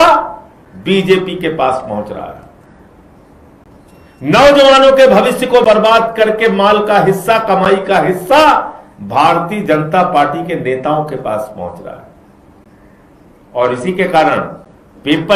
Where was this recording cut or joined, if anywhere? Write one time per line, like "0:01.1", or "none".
none